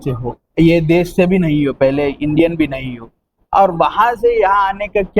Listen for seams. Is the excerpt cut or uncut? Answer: uncut